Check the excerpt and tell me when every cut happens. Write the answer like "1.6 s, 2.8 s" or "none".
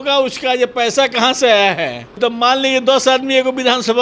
2.2 s